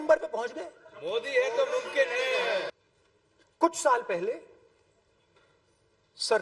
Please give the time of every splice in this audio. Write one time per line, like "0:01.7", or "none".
0:02.7